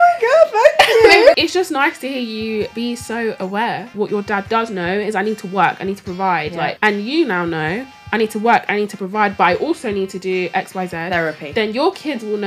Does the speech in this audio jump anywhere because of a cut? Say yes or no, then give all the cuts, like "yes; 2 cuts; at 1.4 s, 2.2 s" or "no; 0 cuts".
yes; 4 cuts; at 1.3 s, 2.7 s, 3.9 s, 6.7 s